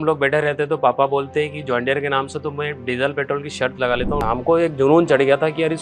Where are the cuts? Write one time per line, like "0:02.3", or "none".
0:04.2

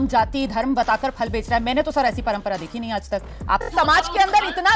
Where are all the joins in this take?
0:03.6

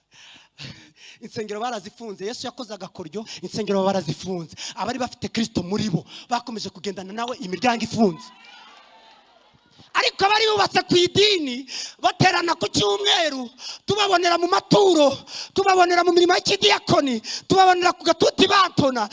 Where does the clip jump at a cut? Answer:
0:03.4

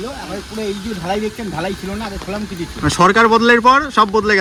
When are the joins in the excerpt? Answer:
none

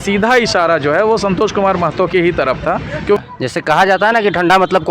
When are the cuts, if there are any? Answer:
0:03.2

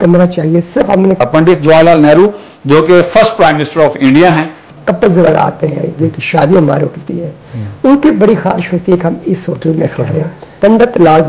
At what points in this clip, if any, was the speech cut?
0:01.2
0:04.7
0:10.4

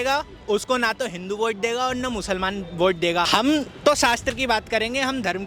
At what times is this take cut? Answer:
0:03.3

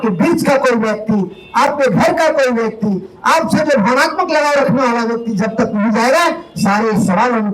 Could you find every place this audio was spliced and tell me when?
none

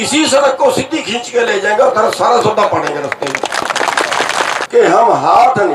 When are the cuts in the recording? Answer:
0:04.6

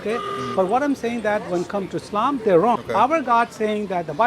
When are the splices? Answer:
0:02.8

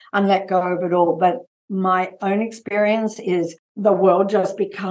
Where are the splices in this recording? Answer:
0:03.6

